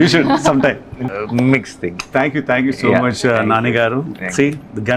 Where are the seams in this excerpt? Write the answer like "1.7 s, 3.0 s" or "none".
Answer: 1.0 s